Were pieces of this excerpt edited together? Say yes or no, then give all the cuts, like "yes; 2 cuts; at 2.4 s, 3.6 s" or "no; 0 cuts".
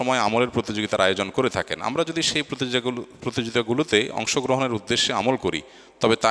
no; 0 cuts